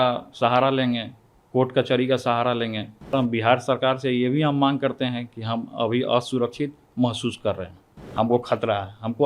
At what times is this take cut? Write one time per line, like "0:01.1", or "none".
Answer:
0:03.1
0:08.0